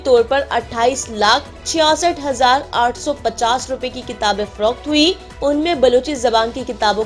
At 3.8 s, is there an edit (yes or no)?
no